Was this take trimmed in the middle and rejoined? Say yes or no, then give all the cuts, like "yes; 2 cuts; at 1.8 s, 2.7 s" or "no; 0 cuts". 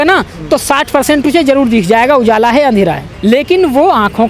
yes; 1 cut; at 3.1 s